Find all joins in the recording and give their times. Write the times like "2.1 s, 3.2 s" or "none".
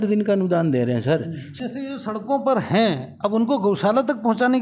1.6 s